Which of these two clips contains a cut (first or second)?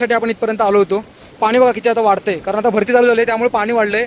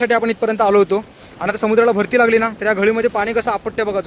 first